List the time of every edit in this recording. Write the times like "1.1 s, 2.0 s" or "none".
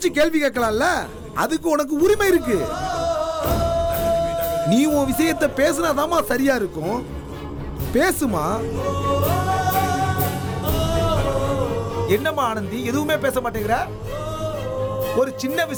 none